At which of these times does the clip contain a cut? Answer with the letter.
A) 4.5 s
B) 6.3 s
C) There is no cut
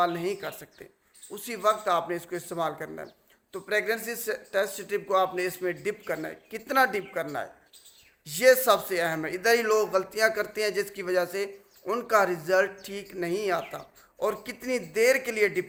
C